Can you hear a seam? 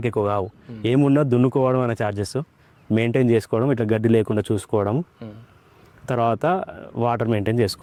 no; 0 cuts

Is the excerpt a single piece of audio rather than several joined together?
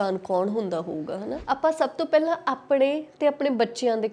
no; 1 cut; at 1.3 s

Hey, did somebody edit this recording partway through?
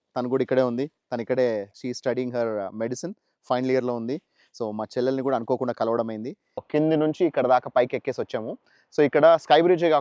yes; 2 cuts; at 1.7 s, 6.6 s

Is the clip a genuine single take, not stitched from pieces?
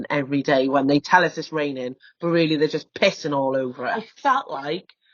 no; 1 cut; at 4.1 s

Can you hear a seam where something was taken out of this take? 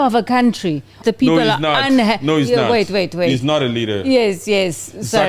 yes; 1 cut; at 1.0 s

